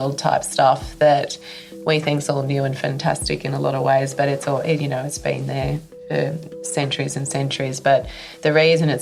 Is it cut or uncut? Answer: uncut